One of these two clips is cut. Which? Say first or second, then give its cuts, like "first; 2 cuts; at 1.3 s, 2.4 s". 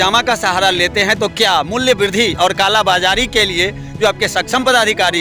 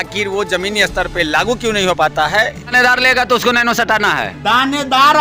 second; 1 cut; at 2.7 s